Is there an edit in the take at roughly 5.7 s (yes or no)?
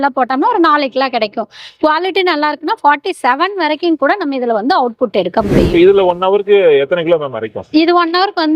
yes